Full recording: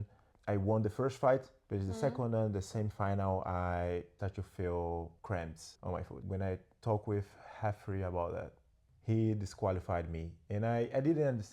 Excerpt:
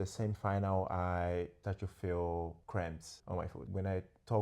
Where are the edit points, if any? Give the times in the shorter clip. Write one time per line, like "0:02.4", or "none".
none